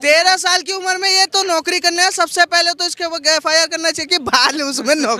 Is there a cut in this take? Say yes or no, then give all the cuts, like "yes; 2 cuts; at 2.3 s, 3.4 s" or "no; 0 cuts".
no; 0 cuts